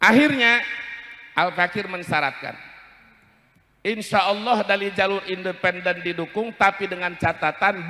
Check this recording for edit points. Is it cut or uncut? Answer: uncut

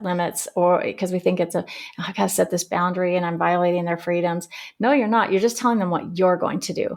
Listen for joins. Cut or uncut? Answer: uncut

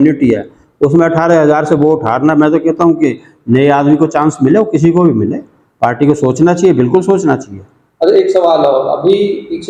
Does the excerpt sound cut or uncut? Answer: uncut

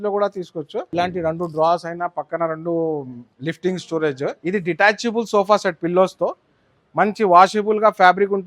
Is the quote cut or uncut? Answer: cut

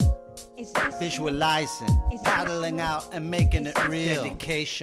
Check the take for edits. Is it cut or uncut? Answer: cut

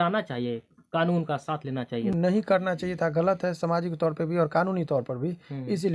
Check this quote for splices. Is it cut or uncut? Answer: cut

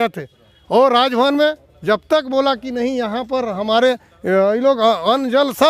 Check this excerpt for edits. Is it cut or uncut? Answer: uncut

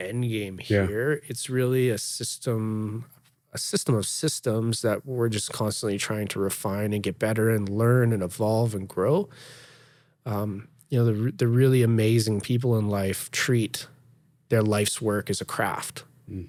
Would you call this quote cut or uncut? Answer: uncut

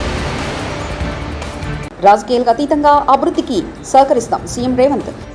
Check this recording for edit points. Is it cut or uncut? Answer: cut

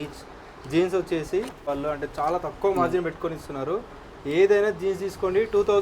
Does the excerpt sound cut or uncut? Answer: cut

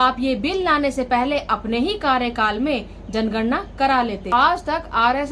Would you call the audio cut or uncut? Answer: cut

